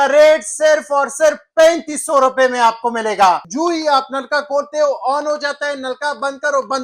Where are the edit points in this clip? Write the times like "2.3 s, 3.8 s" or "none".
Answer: 3.5 s

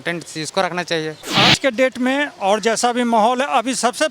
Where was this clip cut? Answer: 1.2 s

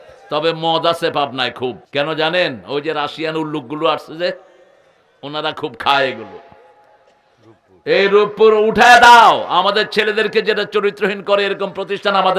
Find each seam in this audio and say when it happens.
1.8 s

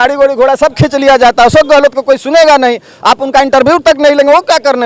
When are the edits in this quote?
none

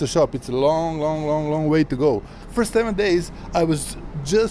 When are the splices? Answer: 2.4 s

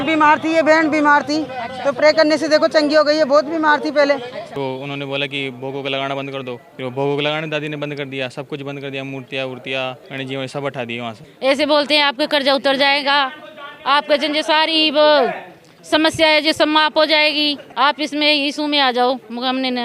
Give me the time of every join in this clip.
4.5 s, 6.7 s, 10.0 s, 11.3 s, 17.6 s

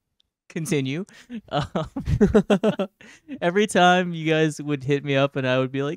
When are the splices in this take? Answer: none

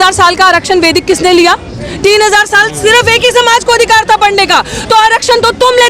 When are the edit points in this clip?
none

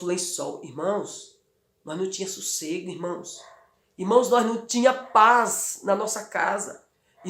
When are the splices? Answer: none

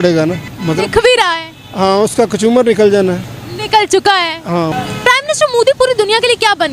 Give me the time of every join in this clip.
4.7 s

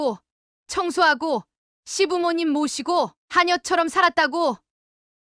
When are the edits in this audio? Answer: none

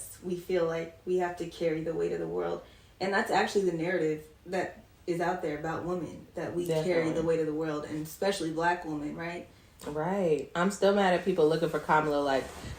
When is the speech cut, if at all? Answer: none

